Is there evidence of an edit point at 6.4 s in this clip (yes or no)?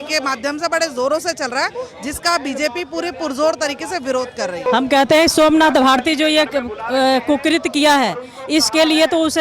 no